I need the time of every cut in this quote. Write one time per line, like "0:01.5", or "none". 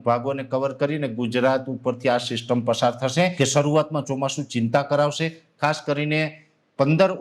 0:03.3